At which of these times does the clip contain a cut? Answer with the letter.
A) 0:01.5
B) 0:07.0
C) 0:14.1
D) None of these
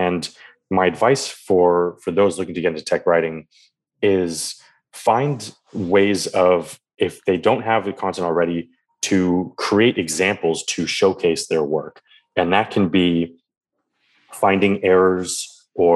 B